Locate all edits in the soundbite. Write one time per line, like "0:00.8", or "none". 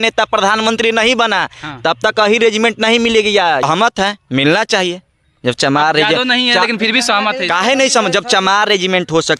0:03.6